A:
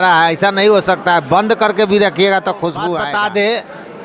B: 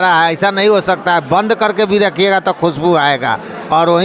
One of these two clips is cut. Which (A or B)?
A